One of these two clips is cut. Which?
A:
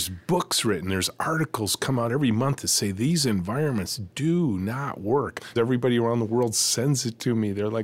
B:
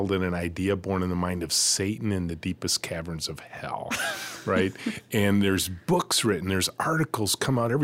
A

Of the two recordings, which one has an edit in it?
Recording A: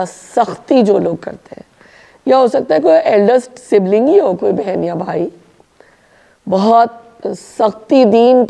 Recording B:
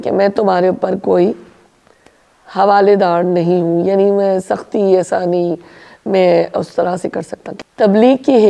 B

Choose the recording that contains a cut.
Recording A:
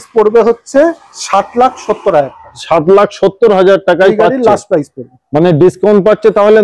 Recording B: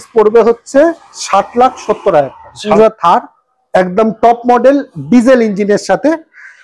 B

